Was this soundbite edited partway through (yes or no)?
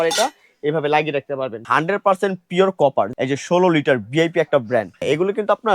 yes